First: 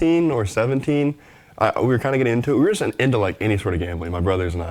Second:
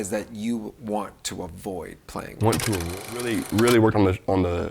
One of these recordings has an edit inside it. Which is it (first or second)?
second